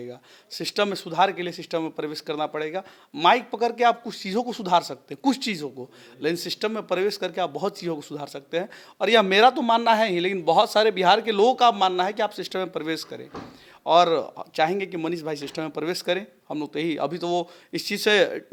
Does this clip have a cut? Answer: no; 0 cuts

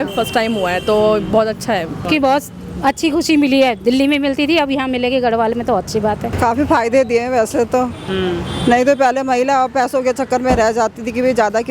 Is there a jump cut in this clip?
yes; 2 cuts; at 2.1 s, 6.3 s

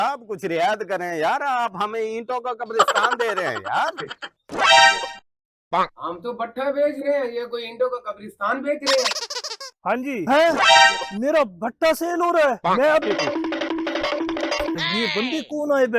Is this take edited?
yes; 3 cuts; at 9.8 s, 13.0 s, 14.9 s

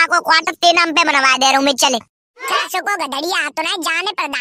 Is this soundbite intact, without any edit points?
no; 1 cut; at 2.4 s

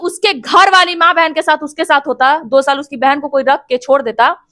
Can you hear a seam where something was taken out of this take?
no; 0 cuts

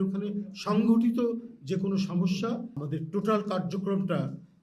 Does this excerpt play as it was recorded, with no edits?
no; 1 cut; at 2.8 s

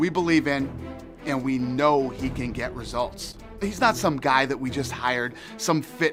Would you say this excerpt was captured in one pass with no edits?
yes; 0 cuts

